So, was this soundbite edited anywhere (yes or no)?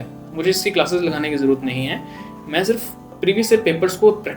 yes